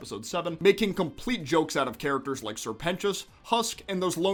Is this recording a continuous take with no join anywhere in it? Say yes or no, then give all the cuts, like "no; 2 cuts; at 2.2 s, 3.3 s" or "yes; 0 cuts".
yes; 0 cuts